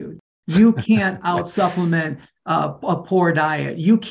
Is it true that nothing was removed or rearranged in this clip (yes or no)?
yes